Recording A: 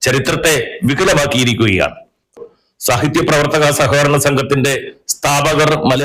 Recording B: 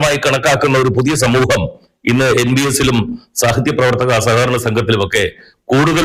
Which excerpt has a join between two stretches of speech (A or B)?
A